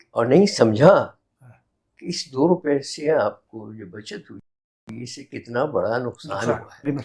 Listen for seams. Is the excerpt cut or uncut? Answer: uncut